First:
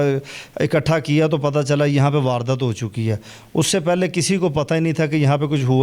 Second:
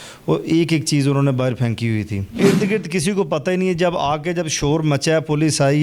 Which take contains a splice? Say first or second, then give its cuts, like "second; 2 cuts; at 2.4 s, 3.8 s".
second; 1 cut; at 2.4 s